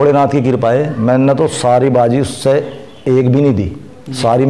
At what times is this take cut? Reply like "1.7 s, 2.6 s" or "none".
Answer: none

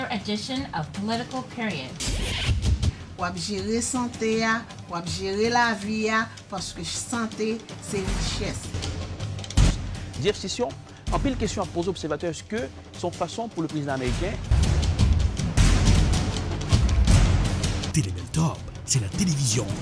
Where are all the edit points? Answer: 1.1 s

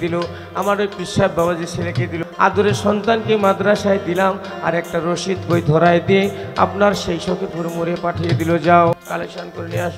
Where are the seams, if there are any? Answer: 2.2 s, 8.9 s

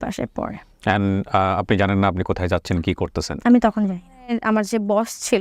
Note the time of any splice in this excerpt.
4.4 s

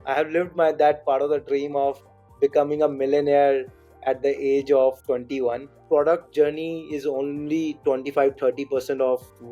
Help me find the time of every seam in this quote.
5.7 s

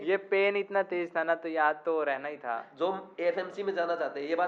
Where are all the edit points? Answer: 2.7 s

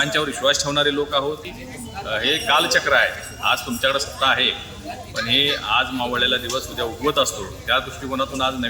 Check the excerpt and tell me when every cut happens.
1.6 s

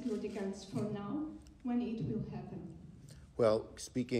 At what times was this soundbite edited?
3.2 s

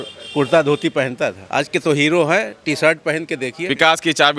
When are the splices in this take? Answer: 1.4 s, 3.6 s

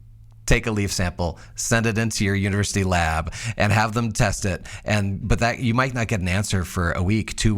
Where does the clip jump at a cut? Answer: 5.2 s

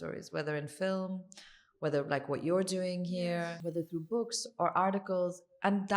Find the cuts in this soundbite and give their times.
3.6 s

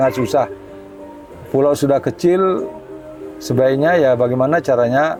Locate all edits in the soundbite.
none

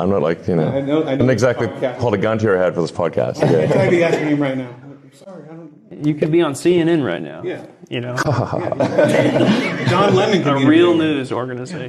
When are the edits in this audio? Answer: 1.2 s

